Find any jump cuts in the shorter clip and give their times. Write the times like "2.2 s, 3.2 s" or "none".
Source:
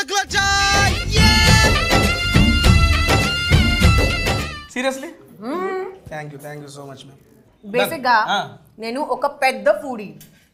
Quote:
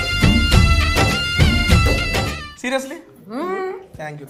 none